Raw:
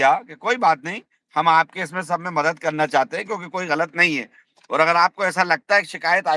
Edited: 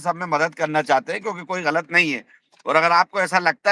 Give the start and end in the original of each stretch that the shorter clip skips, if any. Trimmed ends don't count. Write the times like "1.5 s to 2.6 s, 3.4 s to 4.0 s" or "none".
none